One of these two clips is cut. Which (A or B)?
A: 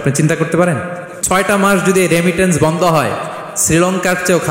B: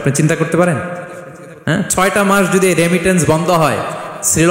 A